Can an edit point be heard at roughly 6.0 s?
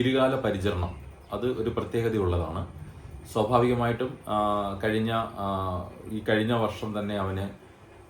no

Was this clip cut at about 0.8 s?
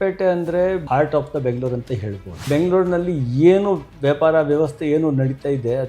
yes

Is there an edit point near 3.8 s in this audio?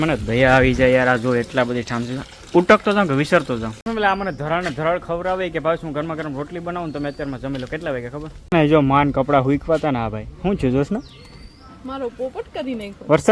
yes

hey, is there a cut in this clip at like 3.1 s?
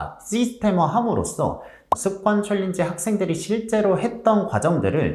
no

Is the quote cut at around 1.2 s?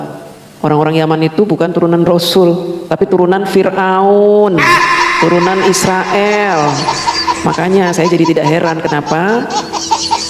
no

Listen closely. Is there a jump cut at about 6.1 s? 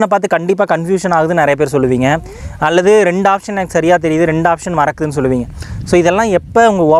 no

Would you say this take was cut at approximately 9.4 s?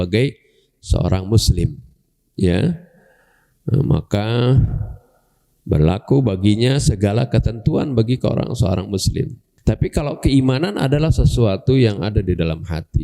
yes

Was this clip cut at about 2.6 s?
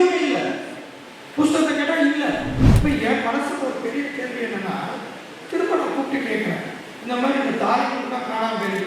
yes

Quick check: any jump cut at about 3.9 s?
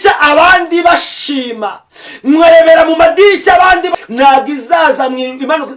yes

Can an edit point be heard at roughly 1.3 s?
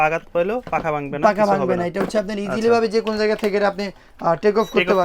no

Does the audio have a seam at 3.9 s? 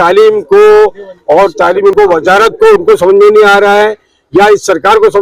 no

